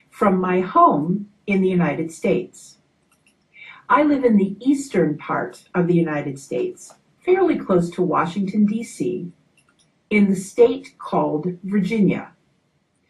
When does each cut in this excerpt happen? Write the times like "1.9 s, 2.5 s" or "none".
1.0 s